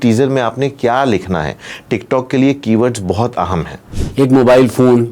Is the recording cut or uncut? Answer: cut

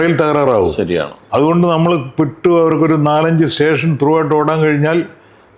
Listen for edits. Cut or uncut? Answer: uncut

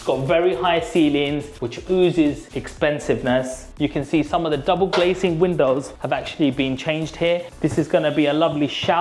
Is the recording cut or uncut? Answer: cut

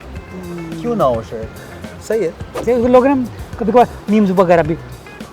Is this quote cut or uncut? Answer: cut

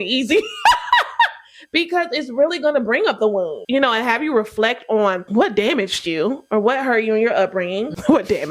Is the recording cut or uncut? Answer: cut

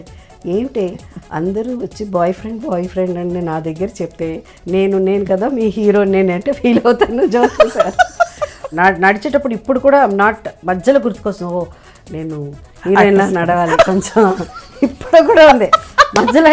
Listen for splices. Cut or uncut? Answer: cut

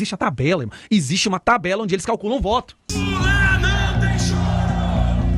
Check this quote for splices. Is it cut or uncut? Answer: cut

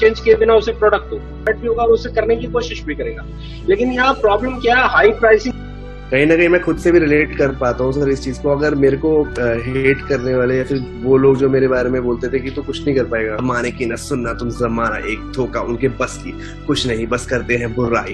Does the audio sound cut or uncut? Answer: cut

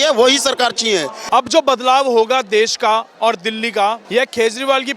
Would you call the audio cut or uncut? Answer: cut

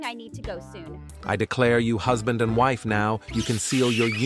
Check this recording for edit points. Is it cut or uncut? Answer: cut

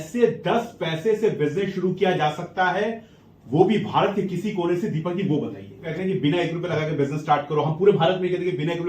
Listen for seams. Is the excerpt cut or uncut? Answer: cut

